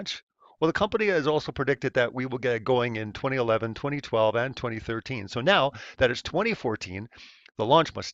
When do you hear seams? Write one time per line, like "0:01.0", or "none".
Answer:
0:05.8